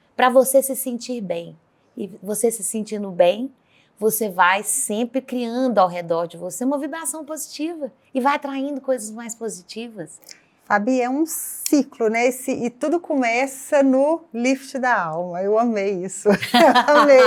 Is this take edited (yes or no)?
no